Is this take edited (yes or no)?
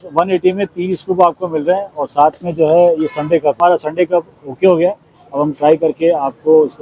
yes